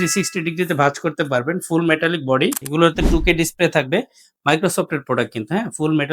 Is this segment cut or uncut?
cut